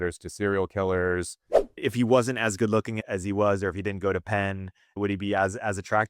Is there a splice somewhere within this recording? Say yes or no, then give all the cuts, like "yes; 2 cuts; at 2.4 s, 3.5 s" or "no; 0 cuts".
yes; 3 cuts; at 1.8 s, 3.0 s, 5.0 s